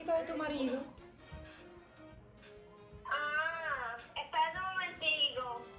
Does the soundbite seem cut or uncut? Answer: uncut